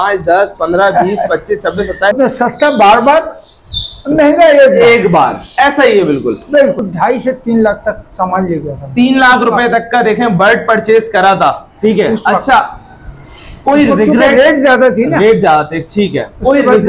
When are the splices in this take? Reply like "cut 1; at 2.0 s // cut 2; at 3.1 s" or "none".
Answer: cut 1; at 2.1 s // cut 2; at 6.9 s